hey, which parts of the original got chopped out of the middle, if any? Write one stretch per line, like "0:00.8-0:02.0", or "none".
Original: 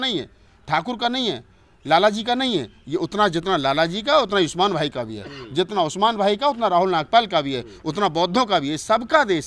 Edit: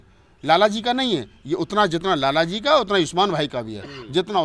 none